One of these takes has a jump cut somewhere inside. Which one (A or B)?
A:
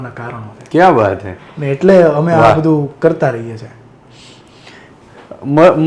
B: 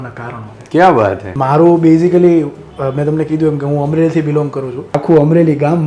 B